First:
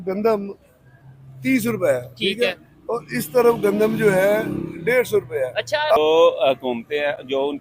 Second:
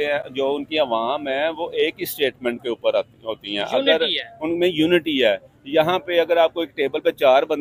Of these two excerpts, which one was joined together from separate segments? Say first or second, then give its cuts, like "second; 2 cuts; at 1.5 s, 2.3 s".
first; 1 cut; at 6.0 s